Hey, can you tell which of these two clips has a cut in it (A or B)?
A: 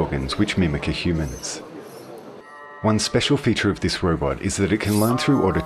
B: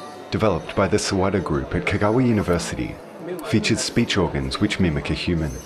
A